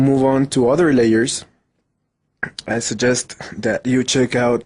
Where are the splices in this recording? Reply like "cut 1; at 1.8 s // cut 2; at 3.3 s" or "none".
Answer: cut 1; at 2.7 s